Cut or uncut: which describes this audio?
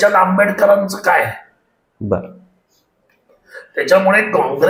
uncut